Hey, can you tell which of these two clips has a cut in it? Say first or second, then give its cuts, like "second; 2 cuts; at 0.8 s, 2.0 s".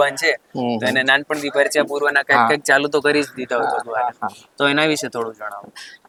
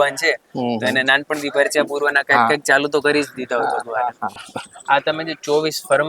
second; 1 cut; at 4.4 s